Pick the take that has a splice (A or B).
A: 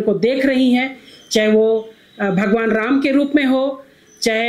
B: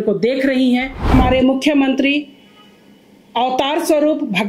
B